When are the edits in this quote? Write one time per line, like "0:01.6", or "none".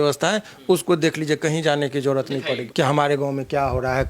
0:02.6